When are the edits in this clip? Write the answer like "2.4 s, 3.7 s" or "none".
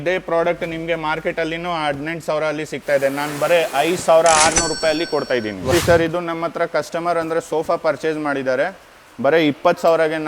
5.7 s